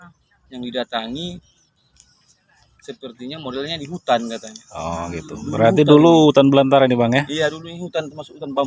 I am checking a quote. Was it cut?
no; 0 cuts

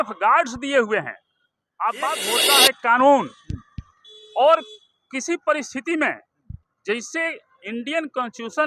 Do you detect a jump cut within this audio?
yes; 1 cut; at 2.2 s

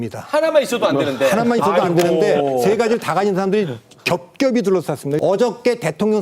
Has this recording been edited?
yes; 1 cut; at 5.2 s

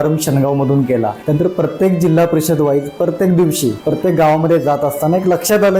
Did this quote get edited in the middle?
yes; 2 cuts; at 1.2 s, 3.8 s

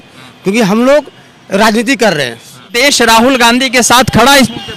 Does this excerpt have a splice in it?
yes; 1 cut; at 2.7 s

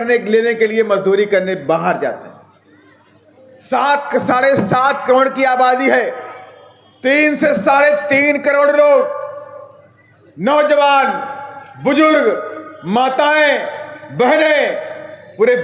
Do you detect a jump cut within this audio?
no; 0 cuts

